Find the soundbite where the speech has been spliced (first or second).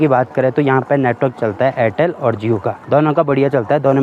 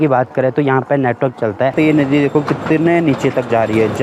second